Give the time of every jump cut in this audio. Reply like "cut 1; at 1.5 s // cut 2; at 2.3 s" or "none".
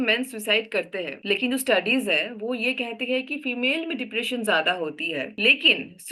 cut 1; at 1.1 s // cut 2; at 5.3 s